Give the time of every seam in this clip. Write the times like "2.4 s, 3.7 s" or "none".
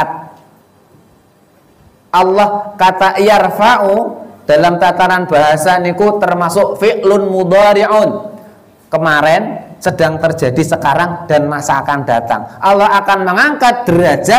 none